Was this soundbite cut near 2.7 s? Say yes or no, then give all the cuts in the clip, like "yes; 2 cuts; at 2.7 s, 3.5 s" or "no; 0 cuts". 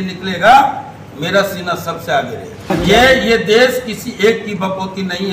yes; 1 cut; at 2.7 s